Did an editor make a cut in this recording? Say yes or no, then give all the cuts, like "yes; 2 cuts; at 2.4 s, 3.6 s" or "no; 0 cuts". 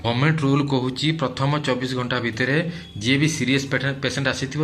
no; 0 cuts